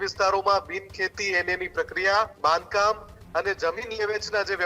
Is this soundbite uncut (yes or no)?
no